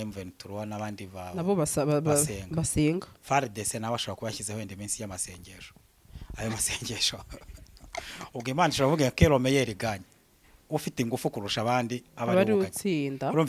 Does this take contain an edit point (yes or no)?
no